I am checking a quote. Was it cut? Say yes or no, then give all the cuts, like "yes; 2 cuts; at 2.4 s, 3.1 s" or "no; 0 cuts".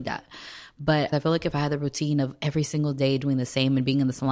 yes; 1 cut; at 1.1 s